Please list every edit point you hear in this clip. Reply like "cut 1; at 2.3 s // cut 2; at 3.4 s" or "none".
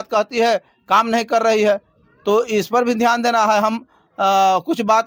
none